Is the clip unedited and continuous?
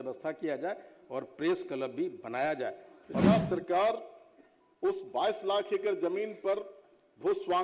no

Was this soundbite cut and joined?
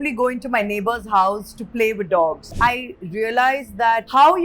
yes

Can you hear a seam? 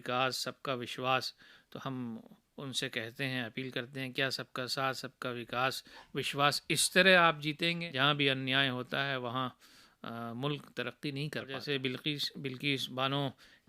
yes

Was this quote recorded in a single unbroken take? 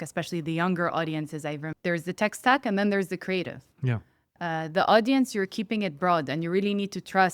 no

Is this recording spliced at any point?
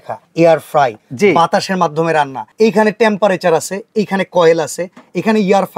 no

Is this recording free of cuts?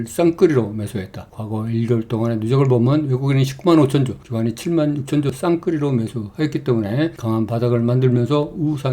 no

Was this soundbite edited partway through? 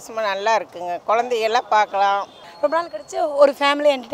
yes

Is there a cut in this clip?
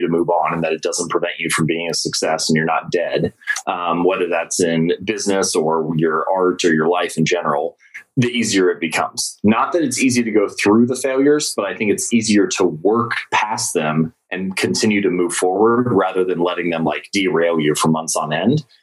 no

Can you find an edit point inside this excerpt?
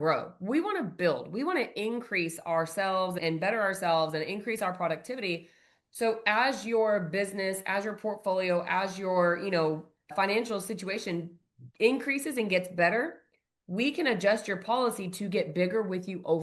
no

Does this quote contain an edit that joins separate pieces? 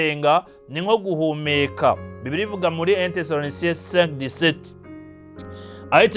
no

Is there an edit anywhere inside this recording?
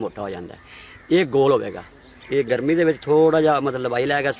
no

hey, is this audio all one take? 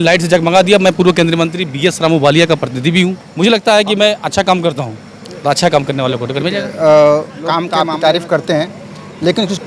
no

